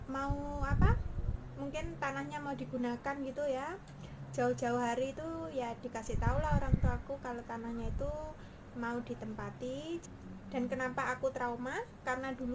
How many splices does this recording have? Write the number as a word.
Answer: one